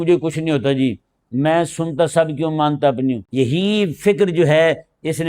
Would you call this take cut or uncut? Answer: cut